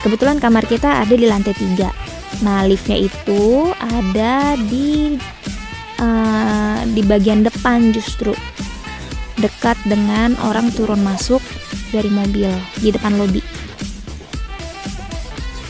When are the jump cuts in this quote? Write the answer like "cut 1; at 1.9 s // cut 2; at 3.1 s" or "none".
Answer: none